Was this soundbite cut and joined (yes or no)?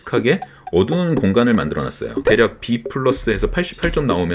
yes